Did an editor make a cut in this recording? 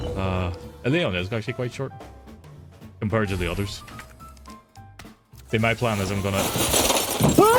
no; 0 cuts

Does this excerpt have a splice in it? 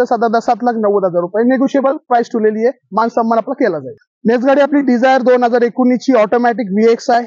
no; 0 cuts

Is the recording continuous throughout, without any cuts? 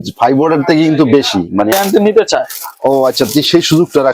no; 1 cut; at 1.7 s

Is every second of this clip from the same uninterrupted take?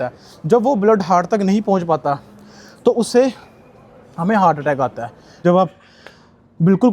no; 1 cut; at 5.0 s

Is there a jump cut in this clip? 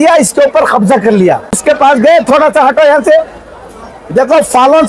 yes; 1 cut; at 1.6 s

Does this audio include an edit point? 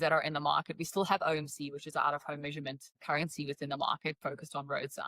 yes; 1 cut; at 3.0 s

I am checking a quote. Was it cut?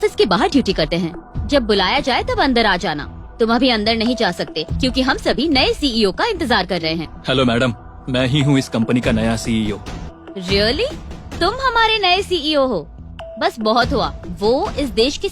yes; 2 cuts; at 7.1 s, 10.0 s

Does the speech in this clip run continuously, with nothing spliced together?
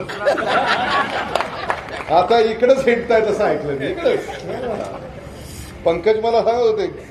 yes; 0 cuts

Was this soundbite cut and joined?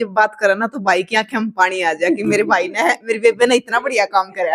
no; 0 cuts

